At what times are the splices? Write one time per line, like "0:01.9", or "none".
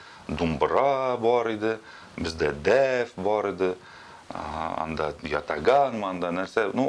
none